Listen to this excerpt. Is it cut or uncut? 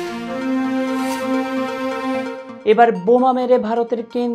uncut